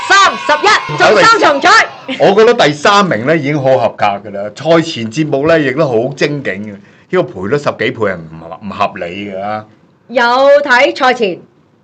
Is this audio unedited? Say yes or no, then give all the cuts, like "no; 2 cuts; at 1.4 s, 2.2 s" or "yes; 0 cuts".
no; 1 cut; at 0.9 s